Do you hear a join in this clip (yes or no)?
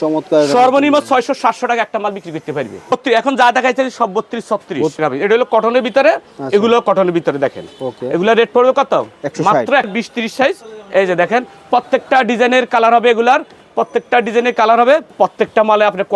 yes